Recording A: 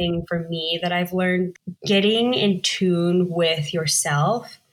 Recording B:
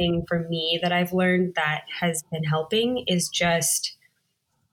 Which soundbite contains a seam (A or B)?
A